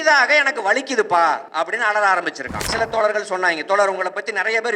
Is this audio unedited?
no; 2 cuts; at 1.5 s, 2.7 s

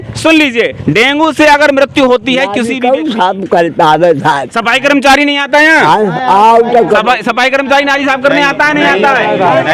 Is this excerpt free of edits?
no; 1 cut; at 2.6 s

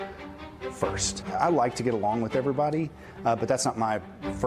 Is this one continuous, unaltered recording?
no; 1 cut; at 1.2 s

